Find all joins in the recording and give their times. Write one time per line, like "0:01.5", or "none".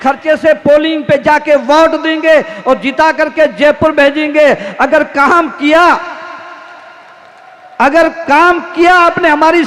none